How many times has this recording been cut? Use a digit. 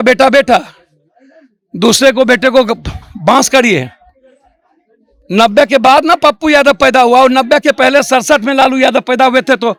0